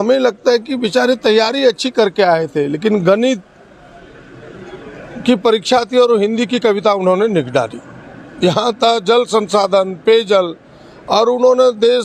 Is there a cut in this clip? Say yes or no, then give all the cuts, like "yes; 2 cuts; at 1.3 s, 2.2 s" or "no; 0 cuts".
no; 0 cuts